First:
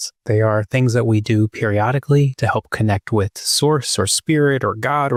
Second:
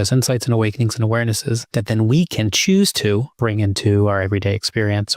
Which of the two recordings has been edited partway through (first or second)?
second